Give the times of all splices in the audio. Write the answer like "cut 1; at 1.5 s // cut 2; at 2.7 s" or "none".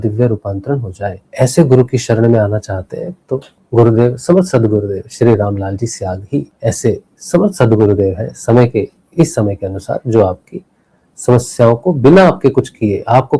cut 1; at 1.2 s // cut 2; at 3.5 s // cut 3; at 6.5 s

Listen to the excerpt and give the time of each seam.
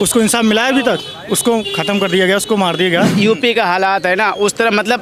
cut 1; at 3.1 s

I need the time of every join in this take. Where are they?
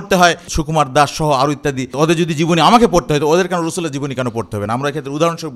cut 1; at 1.9 s

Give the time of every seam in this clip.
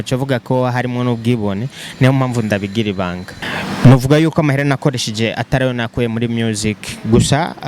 cut 1; at 3.3 s

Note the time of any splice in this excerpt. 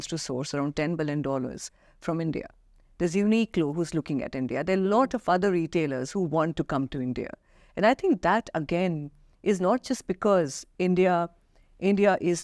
none

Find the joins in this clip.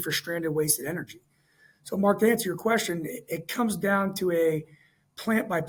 none

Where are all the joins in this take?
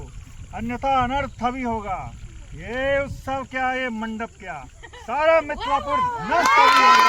none

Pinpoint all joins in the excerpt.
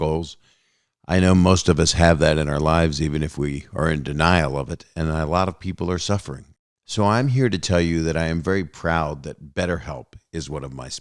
none

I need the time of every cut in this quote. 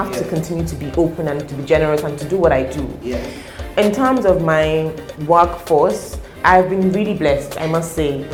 none

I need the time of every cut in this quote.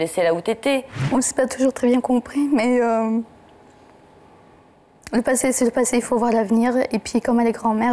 cut 1; at 1.0 s

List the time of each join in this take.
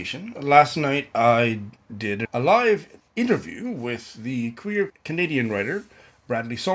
cut 1; at 2.2 s // cut 2; at 3.0 s // cut 3; at 5.0 s

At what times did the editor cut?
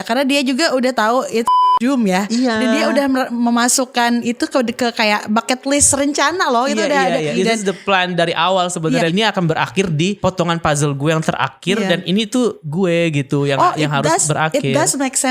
cut 1; at 3.3 s // cut 2; at 7.3 s // cut 3; at 9.1 s // cut 4; at 10.2 s // cut 5; at 12.6 s

